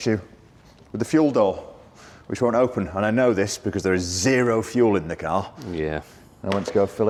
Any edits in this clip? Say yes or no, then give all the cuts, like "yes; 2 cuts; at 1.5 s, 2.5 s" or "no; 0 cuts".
no; 0 cuts